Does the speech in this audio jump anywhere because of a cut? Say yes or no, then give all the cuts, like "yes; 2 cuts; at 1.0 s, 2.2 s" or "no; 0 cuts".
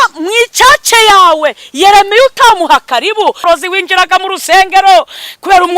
yes; 1 cut; at 3.4 s